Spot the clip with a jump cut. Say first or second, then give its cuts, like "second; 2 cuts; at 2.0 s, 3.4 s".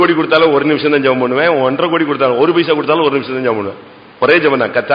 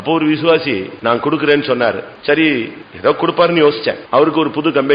second; 4 cuts; at 0.9 s, 2.1 s, 2.8 s, 4.0 s